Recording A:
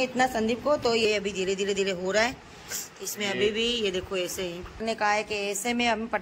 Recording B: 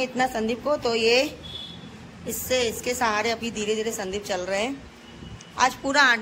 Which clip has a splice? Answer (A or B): A